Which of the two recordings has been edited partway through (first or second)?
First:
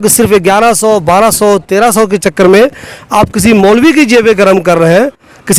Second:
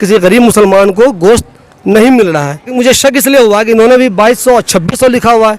second